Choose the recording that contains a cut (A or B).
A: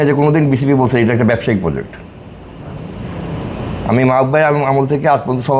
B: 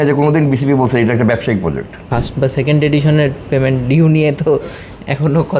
B